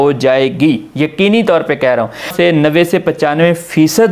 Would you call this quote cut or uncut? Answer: cut